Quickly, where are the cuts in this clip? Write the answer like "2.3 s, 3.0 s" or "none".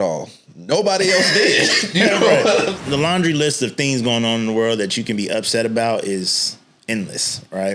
2.8 s